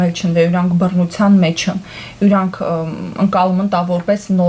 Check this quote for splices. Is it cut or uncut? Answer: uncut